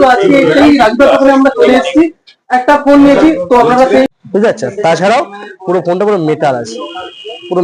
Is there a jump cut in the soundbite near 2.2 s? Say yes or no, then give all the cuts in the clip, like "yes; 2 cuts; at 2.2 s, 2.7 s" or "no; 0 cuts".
no; 1 cut; at 4.1 s